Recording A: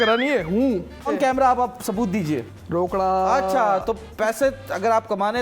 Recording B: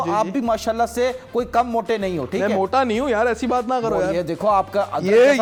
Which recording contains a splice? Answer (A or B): A